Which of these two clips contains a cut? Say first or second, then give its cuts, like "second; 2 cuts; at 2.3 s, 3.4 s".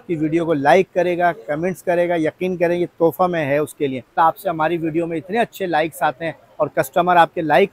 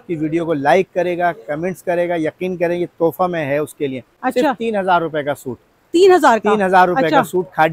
first; 1 cut; at 4.1 s